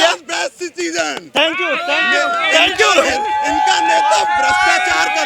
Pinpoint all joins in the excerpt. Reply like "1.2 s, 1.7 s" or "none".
none